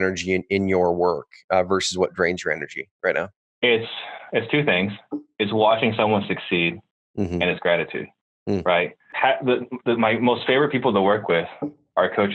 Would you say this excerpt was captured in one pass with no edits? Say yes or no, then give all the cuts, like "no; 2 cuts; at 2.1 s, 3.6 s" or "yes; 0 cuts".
no; 2 cuts; at 3.4 s, 9.0 s